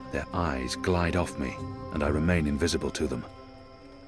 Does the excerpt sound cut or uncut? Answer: uncut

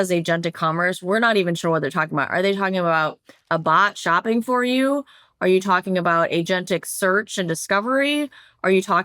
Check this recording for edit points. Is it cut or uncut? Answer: uncut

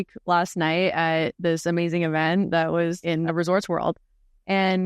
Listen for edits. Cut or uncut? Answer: cut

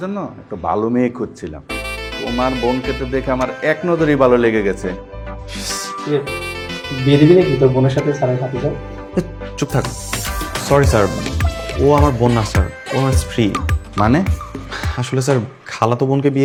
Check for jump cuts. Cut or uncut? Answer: uncut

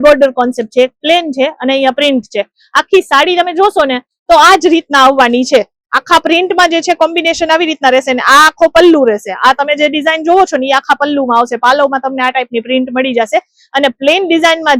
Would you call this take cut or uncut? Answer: uncut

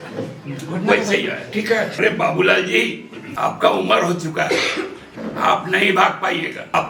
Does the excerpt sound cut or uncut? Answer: cut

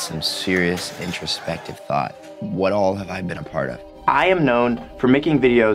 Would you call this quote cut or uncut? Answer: cut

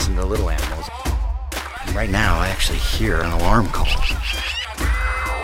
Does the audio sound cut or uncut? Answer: uncut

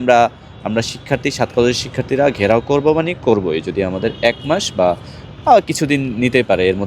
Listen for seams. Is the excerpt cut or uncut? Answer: uncut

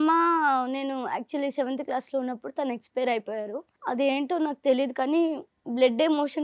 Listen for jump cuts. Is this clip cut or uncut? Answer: cut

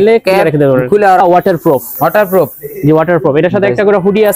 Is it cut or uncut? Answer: cut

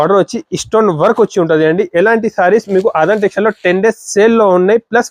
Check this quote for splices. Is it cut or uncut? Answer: uncut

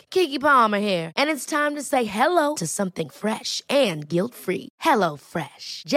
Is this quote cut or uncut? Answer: uncut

